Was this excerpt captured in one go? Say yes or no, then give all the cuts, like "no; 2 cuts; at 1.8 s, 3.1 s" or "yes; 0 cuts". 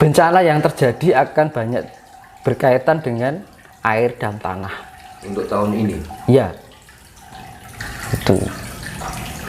no; 1 cut; at 7.8 s